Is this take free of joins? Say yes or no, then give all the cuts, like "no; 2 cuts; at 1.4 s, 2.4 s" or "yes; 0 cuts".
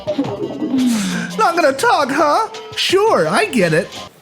yes; 0 cuts